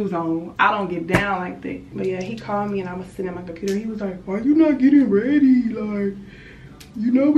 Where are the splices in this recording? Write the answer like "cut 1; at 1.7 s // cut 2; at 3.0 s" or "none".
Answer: cut 1; at 1.9 s